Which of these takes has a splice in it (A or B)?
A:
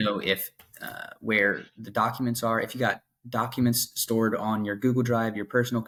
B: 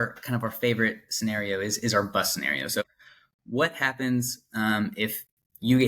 B